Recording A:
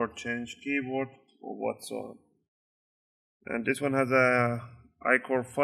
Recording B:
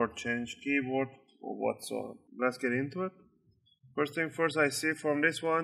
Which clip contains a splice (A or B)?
B